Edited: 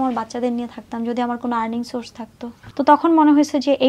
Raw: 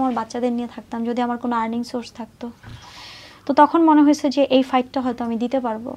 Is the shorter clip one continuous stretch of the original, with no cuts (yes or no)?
no